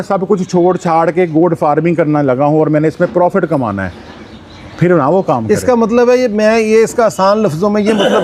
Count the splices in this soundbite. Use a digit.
0